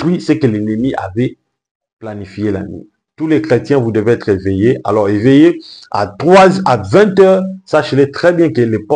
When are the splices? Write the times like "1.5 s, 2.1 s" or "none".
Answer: 3.0 s